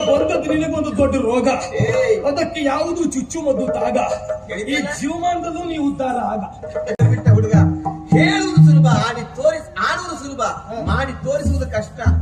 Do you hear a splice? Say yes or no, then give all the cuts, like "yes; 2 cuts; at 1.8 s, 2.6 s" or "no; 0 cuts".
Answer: yes; 1 cut; at 7.0 s